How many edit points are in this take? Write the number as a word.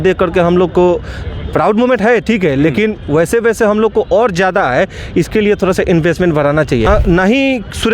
one